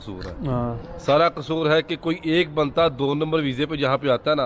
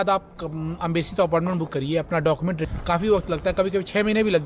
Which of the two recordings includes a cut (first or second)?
second